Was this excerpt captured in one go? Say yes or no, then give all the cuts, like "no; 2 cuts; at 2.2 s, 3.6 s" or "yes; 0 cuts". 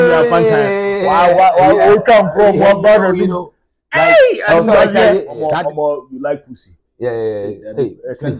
no; 1 cut; at 5.4 s